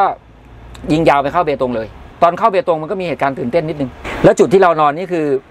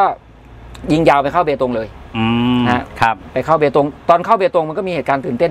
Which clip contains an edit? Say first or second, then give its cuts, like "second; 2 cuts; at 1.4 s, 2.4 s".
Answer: first; 2 cuts; at 2.1 s, 4.0 s